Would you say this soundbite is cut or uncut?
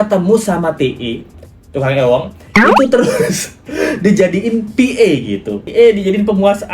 cut